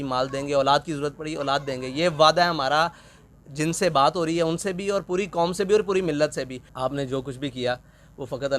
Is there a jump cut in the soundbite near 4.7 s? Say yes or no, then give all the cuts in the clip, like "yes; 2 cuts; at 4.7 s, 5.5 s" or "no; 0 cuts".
no; 1 cut; at 6.6 s